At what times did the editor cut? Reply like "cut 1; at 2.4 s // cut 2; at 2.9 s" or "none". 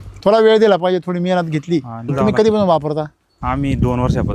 none